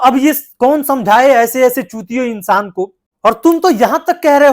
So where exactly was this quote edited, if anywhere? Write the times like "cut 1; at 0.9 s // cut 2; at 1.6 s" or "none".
cut 1; at 3.2 s